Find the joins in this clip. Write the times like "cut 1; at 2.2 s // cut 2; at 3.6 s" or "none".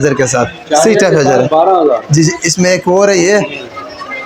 none